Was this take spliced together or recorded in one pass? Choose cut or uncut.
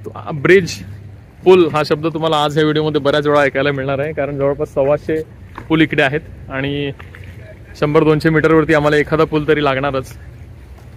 uncut